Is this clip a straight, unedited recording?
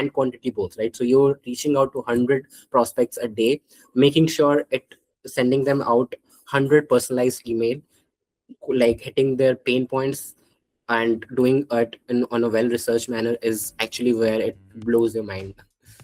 yes; 0 cuts

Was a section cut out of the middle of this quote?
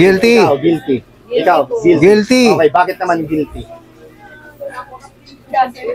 no; 0 cuts

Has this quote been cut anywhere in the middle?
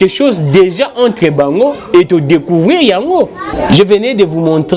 yes; 1 cut; at 3.5 s

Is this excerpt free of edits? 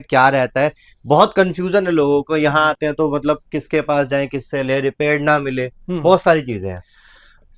yes; 0 cuts

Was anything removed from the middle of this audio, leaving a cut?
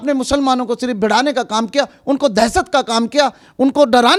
no; 0 cuts

